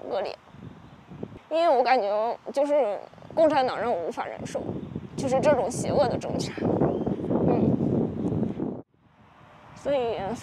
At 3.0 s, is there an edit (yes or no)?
no